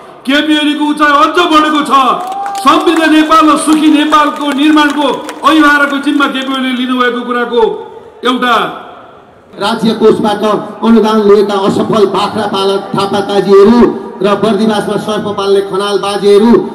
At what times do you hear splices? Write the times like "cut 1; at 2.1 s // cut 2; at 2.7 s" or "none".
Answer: cut 1; at 9.4 s